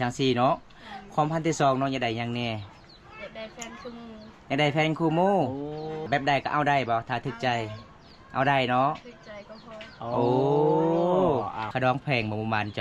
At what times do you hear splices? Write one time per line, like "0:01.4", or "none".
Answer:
0:06.0
0:11.7